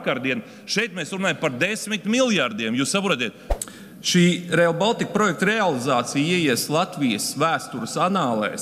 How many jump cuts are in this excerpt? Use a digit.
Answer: 1